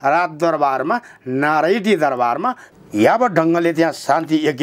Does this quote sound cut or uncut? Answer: cut